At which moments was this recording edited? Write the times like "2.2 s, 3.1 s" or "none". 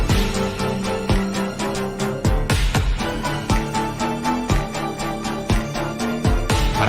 1.7 s